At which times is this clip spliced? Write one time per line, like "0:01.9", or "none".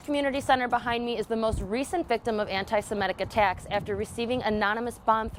none

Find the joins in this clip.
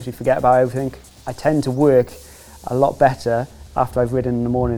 0:01.0

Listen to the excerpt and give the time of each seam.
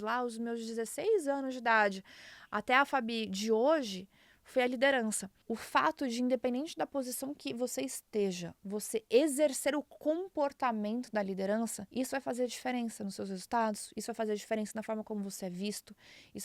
0:05.3
0:11.8

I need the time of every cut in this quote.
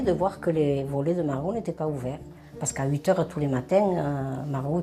none

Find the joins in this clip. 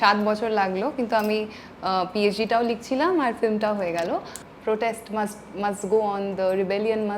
0:04.4

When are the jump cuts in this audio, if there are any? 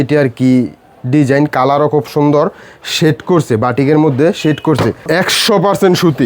0:05.0

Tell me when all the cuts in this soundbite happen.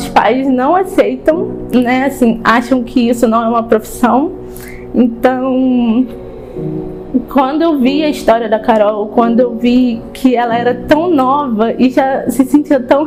none

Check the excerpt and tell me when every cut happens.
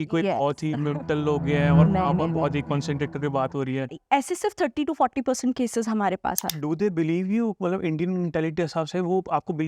0:04.0
0:06.5

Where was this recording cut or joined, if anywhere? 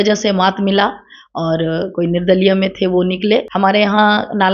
0:03.5

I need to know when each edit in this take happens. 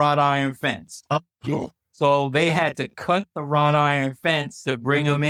none

